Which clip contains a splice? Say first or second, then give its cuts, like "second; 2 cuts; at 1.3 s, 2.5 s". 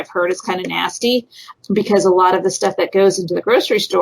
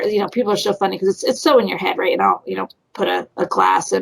first; 1 cut; at 1.5 s